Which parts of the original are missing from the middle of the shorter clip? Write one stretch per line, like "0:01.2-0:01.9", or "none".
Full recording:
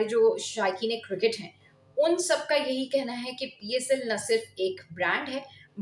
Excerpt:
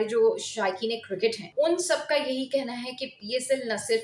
0:01.4-0:01.8